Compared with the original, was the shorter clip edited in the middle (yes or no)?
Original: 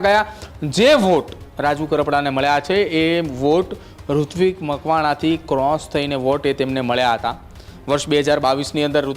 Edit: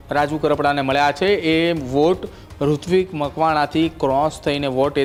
no